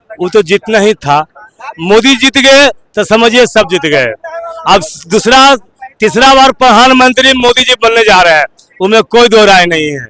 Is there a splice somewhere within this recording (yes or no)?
no